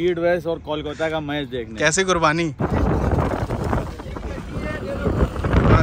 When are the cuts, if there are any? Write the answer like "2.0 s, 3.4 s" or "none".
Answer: 2.5 s